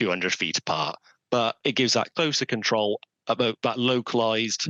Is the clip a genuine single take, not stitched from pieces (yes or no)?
yes